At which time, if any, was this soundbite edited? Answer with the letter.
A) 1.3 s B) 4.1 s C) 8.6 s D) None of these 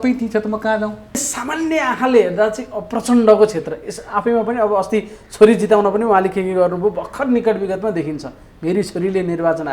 A